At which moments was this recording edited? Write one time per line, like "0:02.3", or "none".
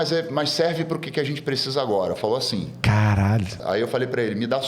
0:03.6